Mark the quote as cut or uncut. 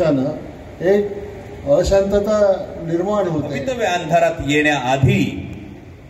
cut